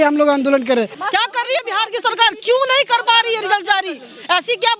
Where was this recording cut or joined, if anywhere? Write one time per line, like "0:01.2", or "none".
0:01.0